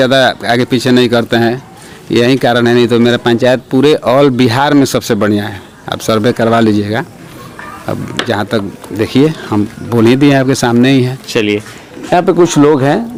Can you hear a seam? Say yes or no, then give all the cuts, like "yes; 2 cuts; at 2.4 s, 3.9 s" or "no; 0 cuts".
no; 0 cuts